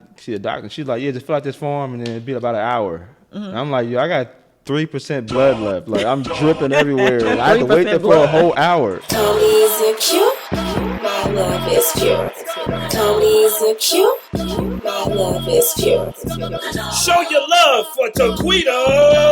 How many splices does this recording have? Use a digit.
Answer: 1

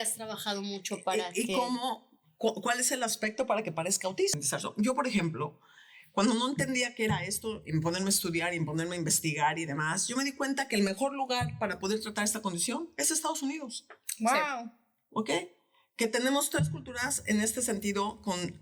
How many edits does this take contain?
1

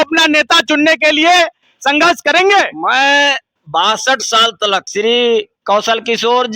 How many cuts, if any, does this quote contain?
1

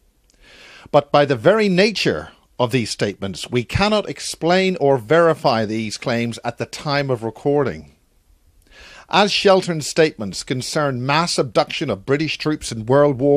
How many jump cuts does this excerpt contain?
1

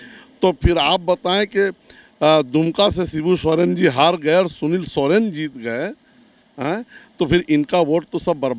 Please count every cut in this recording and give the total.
0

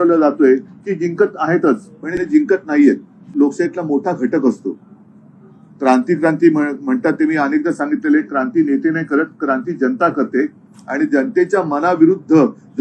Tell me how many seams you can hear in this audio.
1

